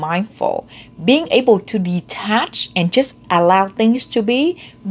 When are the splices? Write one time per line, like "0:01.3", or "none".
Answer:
none

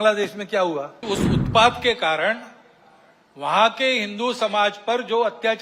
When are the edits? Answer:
0:00.9

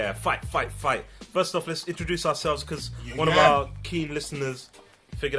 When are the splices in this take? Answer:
0:02.3

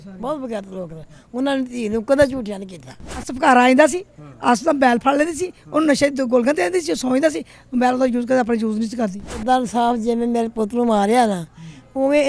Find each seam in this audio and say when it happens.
0:03.3
0:09.4

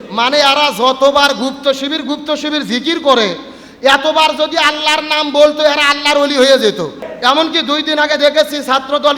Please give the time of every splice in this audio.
0:07.0

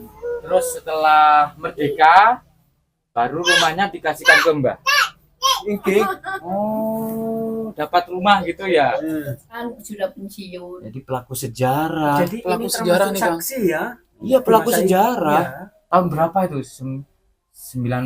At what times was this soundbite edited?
0:09.6

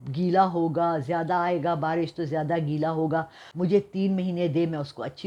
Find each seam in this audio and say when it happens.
0:03.4

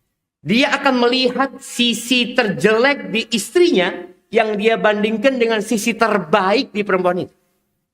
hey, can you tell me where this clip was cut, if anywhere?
0:05.9

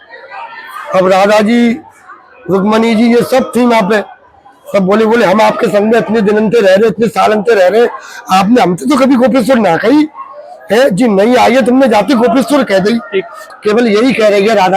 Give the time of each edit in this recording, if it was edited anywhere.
0:13.5

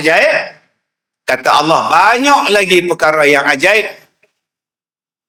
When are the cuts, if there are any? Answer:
none

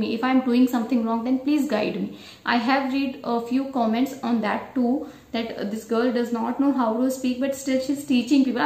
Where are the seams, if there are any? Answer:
none

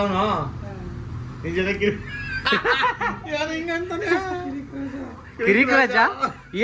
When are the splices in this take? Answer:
none

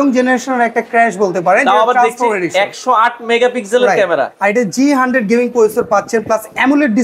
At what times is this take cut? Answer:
none

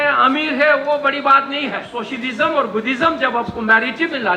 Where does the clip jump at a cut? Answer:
0:01.9

